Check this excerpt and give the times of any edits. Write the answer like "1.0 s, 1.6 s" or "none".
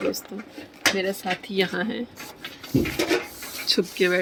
none